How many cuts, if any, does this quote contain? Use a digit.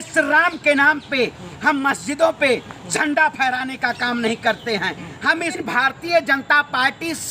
1